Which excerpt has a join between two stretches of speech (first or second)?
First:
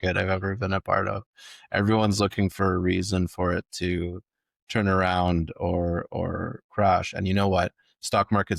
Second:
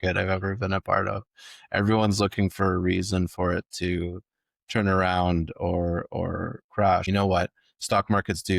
second